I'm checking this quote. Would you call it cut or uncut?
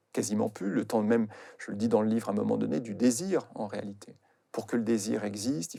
uncut